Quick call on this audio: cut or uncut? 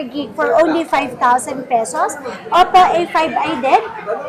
uncut